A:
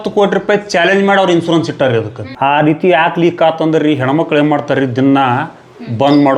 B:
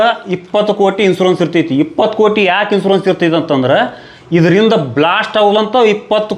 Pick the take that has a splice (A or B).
A